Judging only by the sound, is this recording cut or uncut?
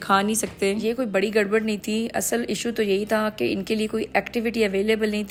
uncut